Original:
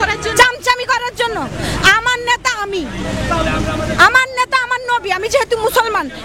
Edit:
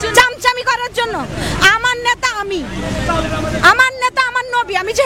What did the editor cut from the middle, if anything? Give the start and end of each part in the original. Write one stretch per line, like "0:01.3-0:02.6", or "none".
0:03.5-0:03.6